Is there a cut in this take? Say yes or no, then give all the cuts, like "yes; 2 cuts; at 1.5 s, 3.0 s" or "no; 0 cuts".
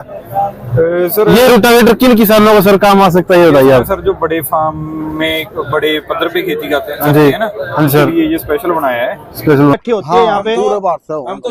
yes; 1 cut; at 9.7 s